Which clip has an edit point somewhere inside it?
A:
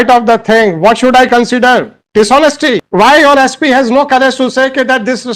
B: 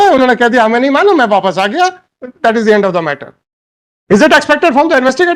A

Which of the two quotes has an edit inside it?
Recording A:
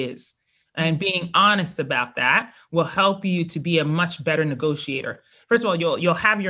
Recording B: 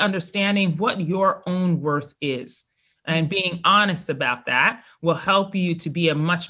A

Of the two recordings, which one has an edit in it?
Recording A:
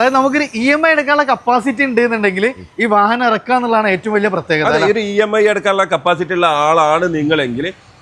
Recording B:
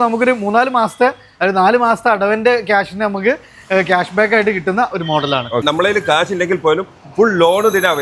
B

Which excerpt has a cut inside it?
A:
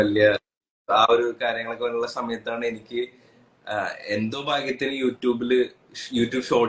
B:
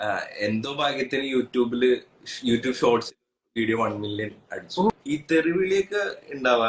B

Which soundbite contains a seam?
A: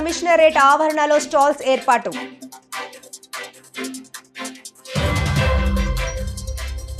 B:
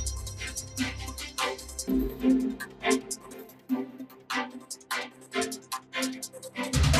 B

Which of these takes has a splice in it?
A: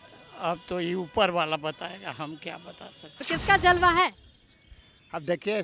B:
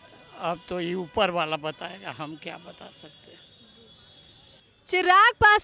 A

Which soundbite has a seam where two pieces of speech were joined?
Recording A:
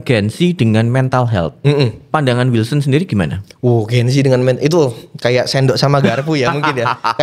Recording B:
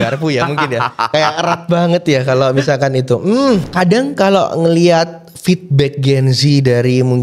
B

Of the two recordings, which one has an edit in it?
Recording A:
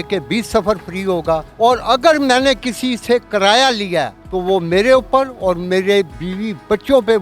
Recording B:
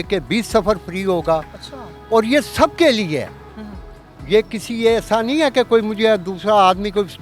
A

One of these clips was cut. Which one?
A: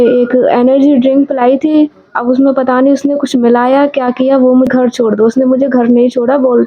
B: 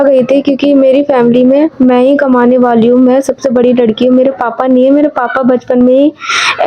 A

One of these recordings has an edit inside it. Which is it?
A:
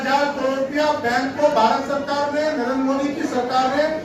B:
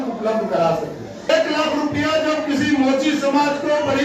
B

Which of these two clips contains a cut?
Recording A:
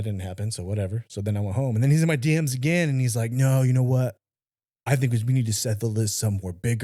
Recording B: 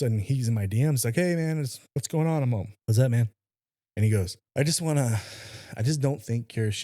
B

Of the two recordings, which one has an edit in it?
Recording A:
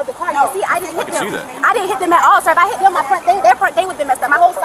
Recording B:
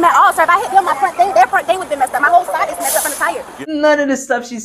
B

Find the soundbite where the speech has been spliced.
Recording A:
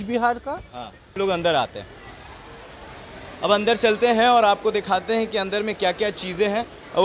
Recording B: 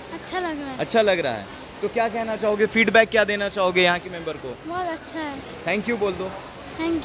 A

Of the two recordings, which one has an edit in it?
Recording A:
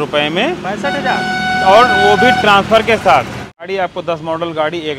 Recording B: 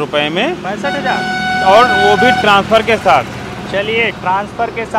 A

